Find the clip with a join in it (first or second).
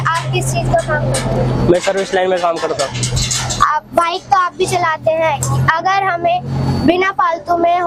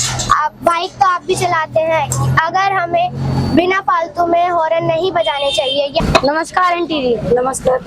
second